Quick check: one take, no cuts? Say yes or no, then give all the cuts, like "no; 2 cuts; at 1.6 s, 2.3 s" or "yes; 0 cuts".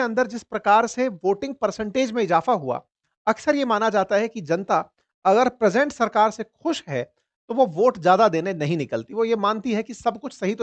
yes; 0 cuts